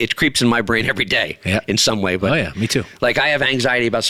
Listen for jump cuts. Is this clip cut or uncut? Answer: uncut